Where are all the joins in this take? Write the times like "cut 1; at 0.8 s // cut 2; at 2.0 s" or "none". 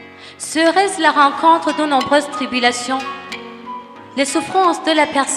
none